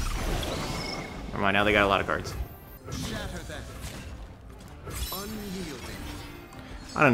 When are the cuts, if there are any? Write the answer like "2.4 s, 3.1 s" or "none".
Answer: 2.7 s, 4.7 s